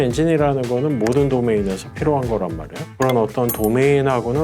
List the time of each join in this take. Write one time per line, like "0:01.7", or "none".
0:03.0